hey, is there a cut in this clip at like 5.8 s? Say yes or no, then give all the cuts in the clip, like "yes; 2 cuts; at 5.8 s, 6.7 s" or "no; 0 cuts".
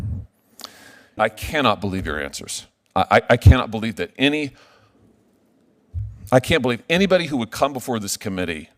no; 1 cut; at 1.1 s